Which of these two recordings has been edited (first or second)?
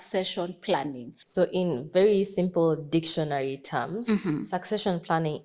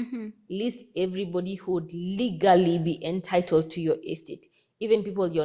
first